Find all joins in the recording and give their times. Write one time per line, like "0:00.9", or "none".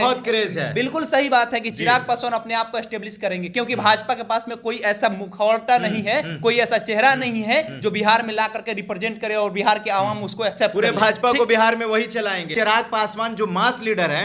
0:12.5